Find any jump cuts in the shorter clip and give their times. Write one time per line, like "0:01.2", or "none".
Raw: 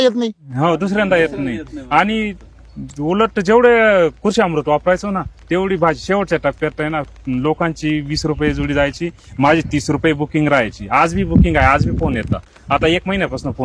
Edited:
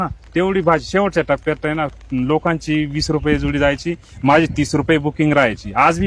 none